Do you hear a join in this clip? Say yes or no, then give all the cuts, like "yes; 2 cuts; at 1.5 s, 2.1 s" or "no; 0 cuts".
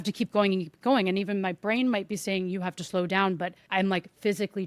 yes; 1 cut; at 3.6 s